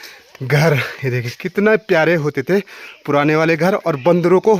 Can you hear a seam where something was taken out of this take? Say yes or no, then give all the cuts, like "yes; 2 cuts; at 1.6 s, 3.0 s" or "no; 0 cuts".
no; 0 cuts